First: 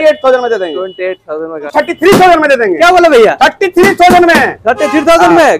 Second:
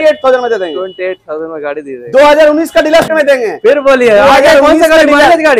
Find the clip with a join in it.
first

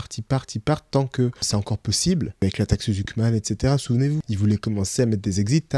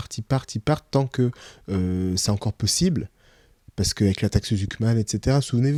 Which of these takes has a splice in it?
first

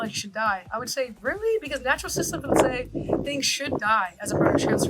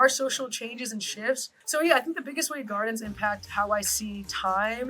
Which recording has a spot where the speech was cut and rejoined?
second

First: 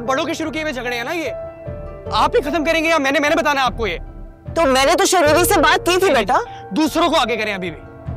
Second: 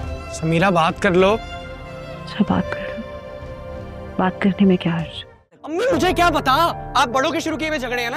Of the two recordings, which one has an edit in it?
second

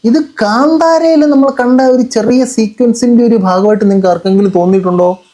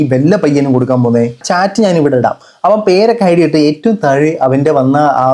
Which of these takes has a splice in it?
second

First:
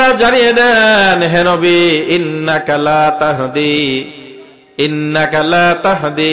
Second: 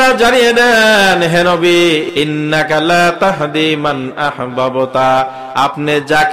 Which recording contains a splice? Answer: second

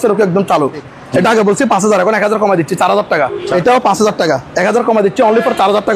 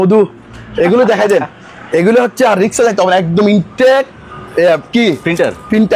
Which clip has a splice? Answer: first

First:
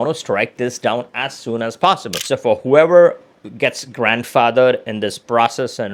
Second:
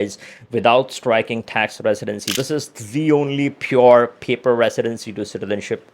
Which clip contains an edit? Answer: second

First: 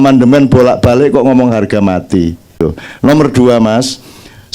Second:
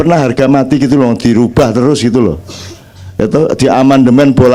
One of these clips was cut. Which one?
first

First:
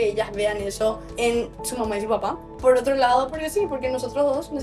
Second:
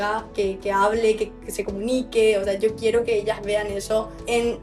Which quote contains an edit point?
first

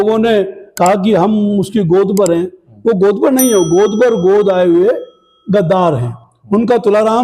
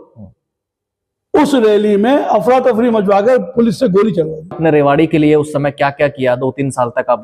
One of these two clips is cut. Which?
second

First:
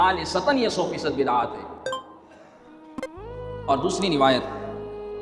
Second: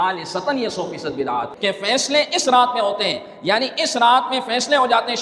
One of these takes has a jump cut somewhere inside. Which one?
second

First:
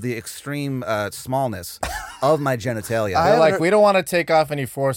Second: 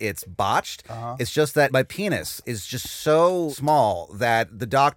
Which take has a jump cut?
second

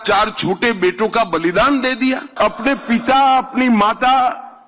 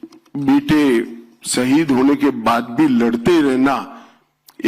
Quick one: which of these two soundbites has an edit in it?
first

